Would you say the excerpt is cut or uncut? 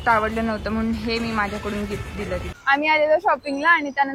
cut